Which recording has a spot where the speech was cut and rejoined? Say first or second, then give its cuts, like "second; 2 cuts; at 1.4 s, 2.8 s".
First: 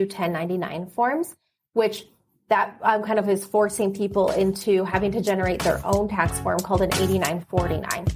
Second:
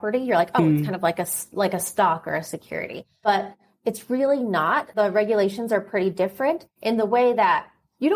second; 2 cuts; at 3.2 s, 4.9 s